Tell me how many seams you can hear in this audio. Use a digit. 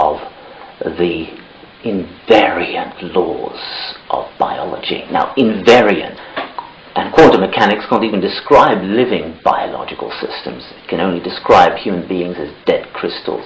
1